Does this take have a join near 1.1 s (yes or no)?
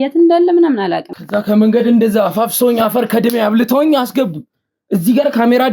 yes